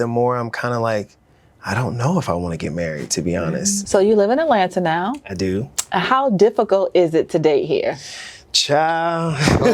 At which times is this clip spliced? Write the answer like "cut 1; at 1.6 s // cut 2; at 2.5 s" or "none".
cut 1; at 3.8 s